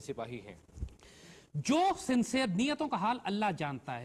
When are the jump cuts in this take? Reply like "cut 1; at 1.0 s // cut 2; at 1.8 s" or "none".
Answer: none